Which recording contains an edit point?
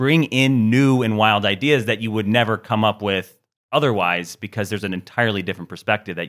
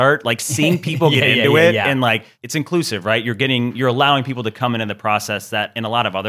second; 1 cut; at 2.3 s

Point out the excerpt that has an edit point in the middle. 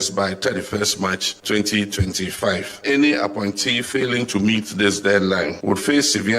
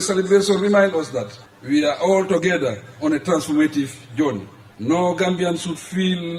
first; 3 cuts; at 1.3 s, 2.8 s, 5.6 s

